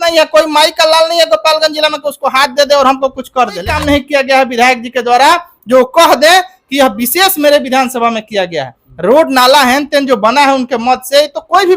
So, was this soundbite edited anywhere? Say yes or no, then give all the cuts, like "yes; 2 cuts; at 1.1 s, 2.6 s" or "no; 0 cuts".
yes; 1 cut; at 3.7 s